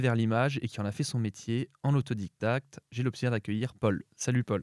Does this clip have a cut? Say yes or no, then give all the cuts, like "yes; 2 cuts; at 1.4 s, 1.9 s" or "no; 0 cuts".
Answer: no; 0 cuts